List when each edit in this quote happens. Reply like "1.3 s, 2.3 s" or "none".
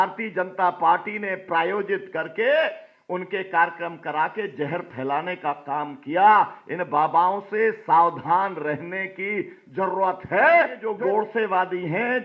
10.8 s